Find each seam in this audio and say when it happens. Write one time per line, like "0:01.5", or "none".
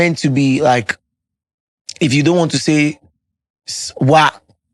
none